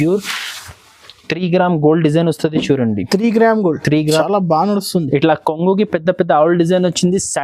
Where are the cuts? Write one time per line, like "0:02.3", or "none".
0:04.2